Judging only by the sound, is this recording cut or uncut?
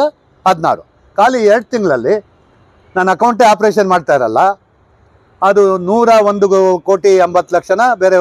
uncut